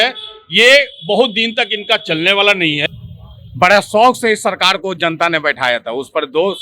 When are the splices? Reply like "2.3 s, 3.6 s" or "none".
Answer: 2.8 s